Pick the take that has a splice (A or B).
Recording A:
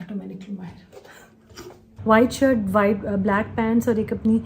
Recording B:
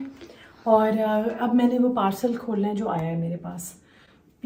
A